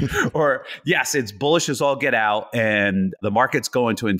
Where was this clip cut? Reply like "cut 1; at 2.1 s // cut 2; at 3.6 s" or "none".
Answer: cut 1; at 3.2 s